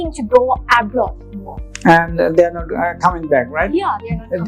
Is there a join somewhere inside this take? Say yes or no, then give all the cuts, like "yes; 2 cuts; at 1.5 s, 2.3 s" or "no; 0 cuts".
no; 0 cuts